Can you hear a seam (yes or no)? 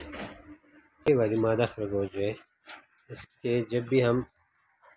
yes